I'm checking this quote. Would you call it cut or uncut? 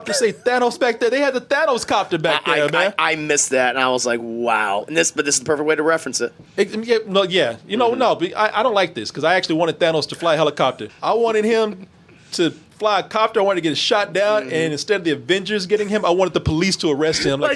cut